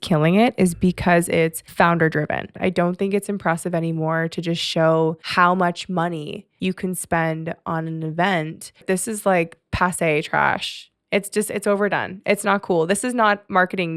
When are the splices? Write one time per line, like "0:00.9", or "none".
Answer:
0:02.6
0:08.8

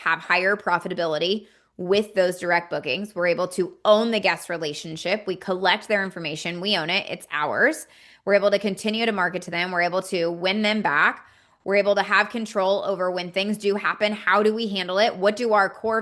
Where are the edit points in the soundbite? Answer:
none

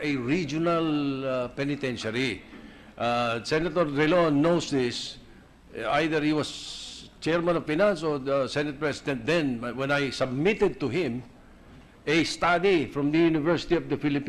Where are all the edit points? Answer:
none

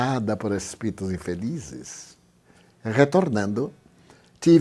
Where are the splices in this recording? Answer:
none

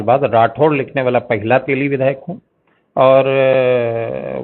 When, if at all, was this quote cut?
none

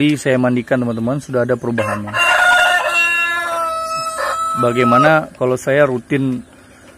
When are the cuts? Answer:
none

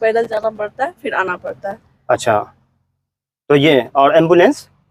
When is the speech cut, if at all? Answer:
none

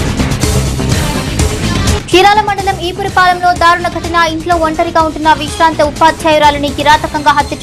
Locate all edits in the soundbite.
none

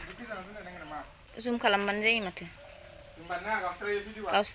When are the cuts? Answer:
0:01.2

